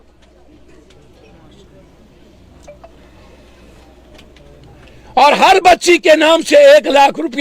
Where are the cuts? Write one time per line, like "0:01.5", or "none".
none